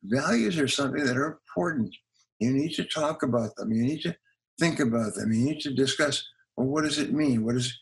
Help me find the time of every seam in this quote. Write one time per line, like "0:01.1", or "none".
none